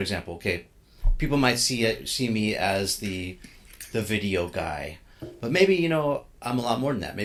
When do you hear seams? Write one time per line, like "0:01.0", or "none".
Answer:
none